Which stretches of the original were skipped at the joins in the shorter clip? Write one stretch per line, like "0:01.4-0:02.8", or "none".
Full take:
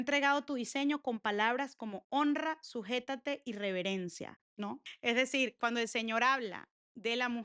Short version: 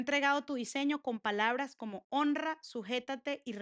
none